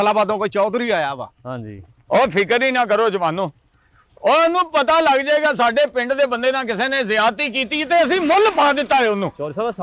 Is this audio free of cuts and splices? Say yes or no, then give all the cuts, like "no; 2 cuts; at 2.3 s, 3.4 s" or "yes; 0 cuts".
yes; 0 cuts